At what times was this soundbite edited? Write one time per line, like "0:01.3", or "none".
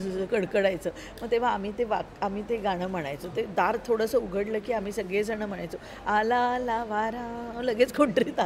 none